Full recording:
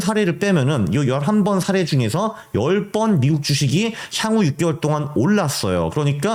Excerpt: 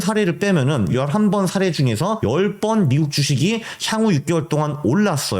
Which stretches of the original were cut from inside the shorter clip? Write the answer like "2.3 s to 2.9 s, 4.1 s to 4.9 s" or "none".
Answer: 0.9 s to 1.0 s, 2.3 s to 2.5 s